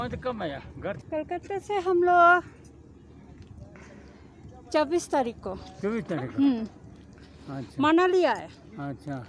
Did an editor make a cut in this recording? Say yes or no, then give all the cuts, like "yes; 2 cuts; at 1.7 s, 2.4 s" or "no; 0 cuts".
yes; 1 cut; at 1.0 s